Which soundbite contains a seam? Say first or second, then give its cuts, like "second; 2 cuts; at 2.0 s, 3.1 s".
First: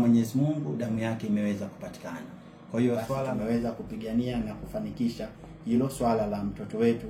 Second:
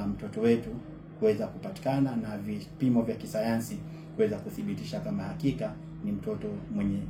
first; 1 cut; at 3.2 s